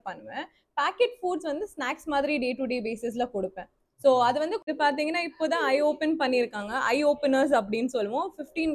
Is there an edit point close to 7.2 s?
no; 1 cut; at 4.6 s

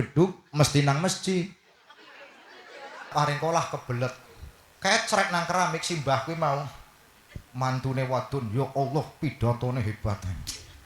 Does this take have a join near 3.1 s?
yes; 1 cut; at 3.1 s

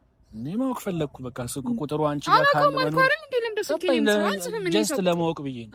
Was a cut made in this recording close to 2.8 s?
no; 0 cuts

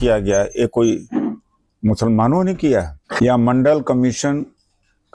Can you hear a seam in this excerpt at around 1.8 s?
no; 1 cut; at 3.0 s

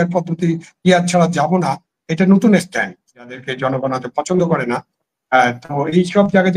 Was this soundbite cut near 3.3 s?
yes; 1 cut; at 3.3 s

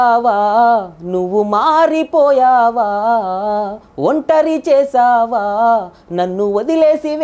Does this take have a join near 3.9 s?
no; 0 cuts

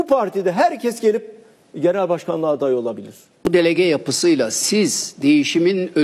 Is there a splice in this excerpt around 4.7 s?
no; 1 cut; at 3.5 s

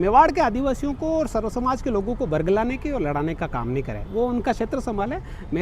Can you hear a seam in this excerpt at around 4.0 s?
no; 0 cuts

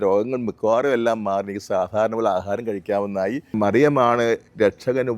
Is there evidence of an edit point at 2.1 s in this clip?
no; 1 cut; at 3.5 s

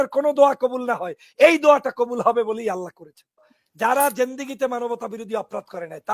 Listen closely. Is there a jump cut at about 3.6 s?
yes; 1 cut; at 3.6 s

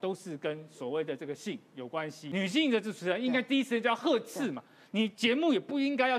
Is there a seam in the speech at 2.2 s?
yes; 1 cut; at 2.2 s

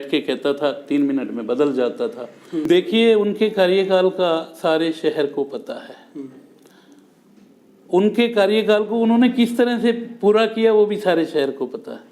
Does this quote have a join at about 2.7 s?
yes; 1 cut; at 2.7 s

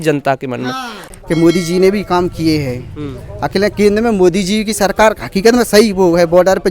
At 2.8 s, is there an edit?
no; 1 cut; at 1.0 s

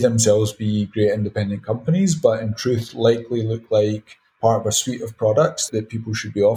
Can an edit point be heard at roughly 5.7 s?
yes; 1 cut; at 5.7 s

